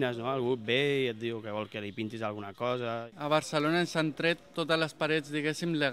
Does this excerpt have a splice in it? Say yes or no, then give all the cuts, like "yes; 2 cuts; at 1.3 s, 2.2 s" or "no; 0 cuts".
yes; 1 cut; at 3.1 s